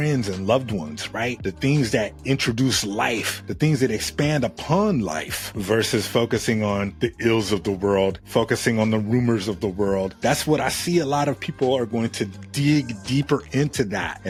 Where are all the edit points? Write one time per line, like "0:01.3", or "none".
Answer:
none